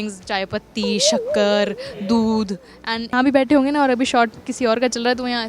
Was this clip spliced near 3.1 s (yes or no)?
yes